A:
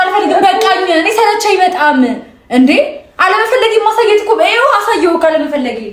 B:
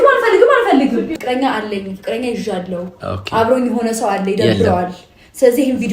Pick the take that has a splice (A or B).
B